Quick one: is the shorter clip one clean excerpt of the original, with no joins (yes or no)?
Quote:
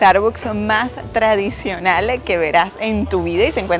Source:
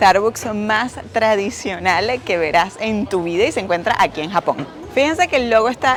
yes